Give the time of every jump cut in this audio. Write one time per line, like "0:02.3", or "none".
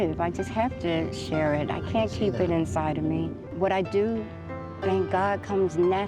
0:03.4